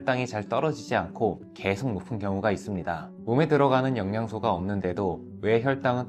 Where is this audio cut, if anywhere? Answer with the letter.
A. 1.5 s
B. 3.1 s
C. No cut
B